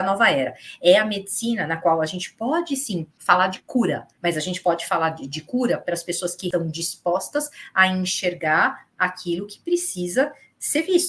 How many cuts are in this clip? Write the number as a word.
three